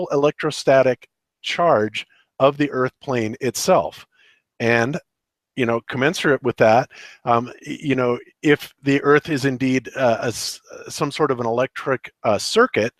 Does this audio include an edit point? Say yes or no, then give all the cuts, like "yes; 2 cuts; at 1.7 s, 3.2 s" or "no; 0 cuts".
no; 0 cuts